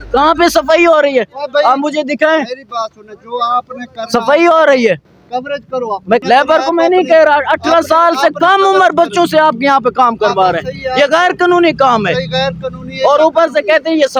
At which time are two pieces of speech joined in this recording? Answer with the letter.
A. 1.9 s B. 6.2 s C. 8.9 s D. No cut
B